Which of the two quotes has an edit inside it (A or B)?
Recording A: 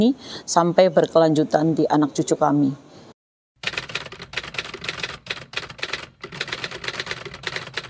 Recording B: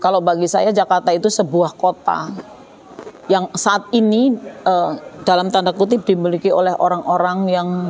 A